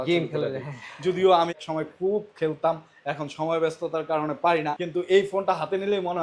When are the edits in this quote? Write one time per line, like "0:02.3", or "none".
0:01.5
0:04.8